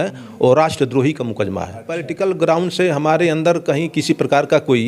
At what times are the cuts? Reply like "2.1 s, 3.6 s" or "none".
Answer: 2.1 s